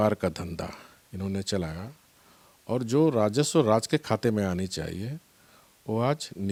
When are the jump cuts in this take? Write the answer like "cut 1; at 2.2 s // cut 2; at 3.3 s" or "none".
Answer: none